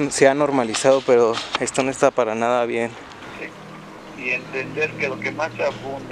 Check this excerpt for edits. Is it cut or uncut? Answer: cut